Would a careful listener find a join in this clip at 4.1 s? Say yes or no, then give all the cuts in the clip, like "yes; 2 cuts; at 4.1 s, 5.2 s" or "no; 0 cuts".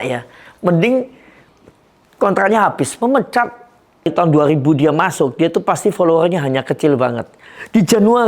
yes; 1 cut; at 4.1 s